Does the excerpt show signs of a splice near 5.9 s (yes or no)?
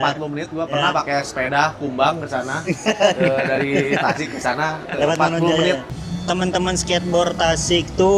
yes